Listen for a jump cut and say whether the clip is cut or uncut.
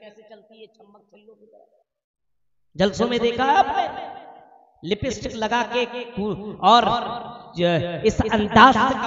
uncut